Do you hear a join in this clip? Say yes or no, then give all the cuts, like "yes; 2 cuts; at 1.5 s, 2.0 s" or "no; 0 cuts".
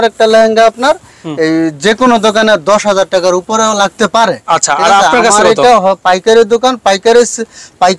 no; 0 cuts